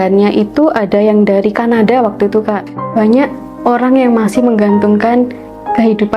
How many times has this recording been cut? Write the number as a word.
one